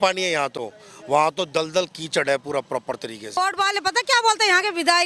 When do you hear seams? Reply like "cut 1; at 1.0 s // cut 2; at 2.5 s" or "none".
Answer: cut 1; at 3.4 s